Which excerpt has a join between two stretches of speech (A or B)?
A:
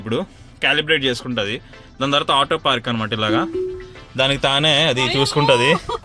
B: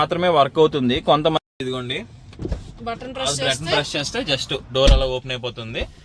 B